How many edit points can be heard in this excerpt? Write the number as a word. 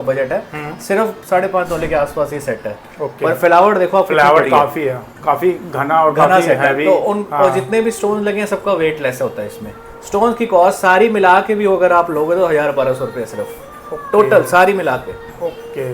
zero